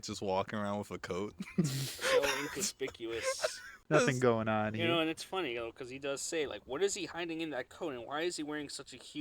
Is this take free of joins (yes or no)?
no